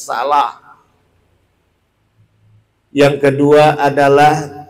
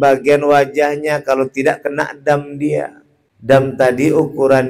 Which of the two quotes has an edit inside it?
second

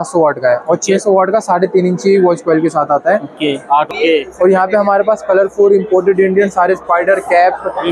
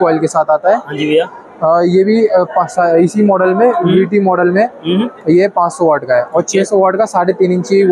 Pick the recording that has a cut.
first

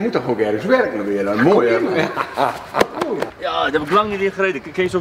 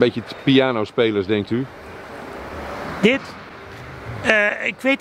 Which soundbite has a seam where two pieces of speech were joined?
first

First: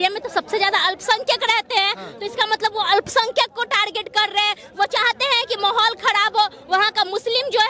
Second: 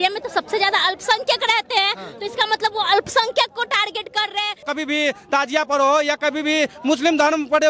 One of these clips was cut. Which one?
second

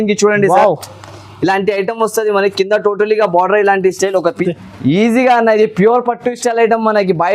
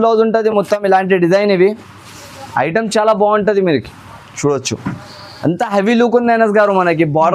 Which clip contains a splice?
first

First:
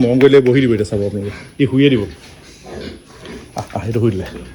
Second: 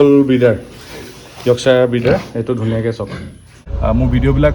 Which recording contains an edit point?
second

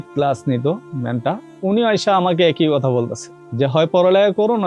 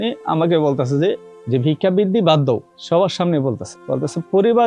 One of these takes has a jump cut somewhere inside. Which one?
second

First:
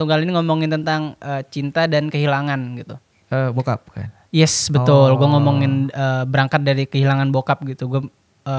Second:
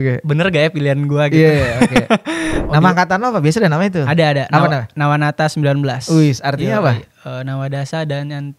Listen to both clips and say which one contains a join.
second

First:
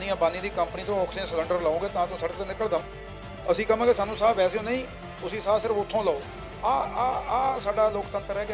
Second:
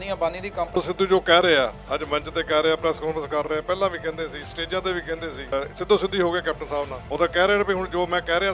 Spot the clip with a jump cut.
second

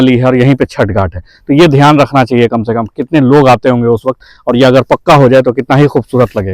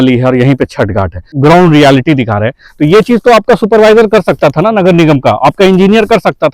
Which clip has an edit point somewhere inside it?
second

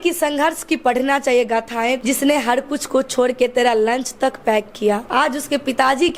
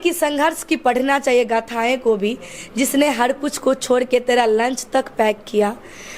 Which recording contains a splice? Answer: first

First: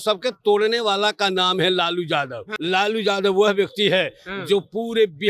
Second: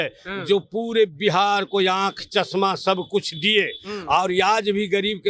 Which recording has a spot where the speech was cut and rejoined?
first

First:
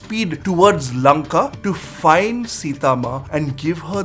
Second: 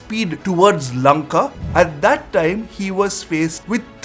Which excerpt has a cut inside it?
second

